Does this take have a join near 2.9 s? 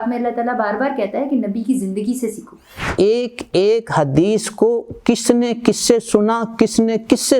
yes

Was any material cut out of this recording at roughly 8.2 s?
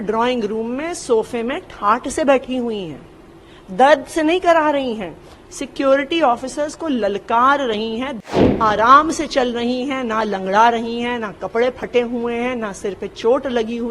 yes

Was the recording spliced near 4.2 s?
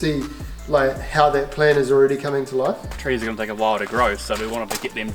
no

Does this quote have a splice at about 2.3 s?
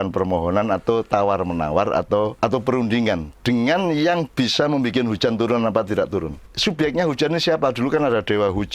yes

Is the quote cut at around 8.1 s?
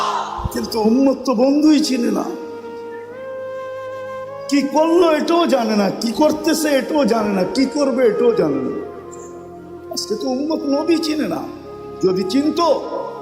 no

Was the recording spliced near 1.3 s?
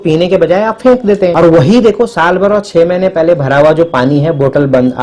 yes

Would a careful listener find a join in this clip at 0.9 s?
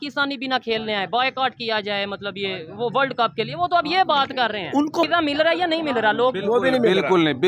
no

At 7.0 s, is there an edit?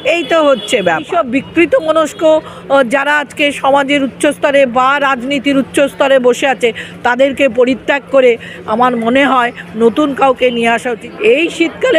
no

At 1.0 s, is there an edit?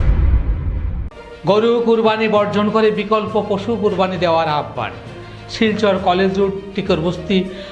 yes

